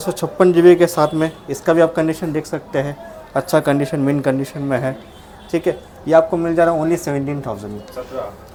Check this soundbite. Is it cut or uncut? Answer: uncut